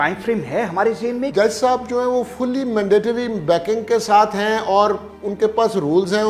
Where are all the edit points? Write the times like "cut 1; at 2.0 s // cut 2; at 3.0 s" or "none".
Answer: cut 1; at 1.3 s